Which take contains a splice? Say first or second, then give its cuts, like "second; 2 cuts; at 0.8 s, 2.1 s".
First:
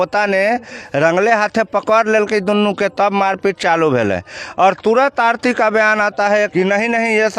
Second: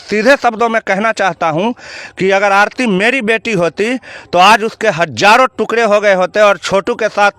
first; 1 cut; at 6.5 s